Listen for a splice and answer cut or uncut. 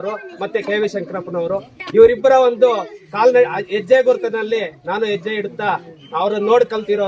uncut